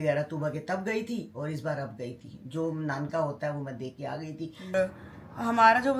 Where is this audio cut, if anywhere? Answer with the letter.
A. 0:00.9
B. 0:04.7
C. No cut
B